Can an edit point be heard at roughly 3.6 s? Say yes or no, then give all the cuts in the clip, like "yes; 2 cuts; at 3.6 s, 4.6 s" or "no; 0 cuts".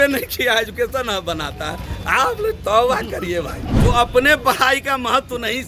yes; 1 cut; at 3.6 s